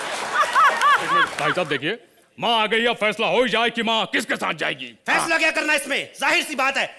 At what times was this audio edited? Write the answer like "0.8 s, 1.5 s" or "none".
1.3 s